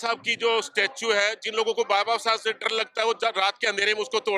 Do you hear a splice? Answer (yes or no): no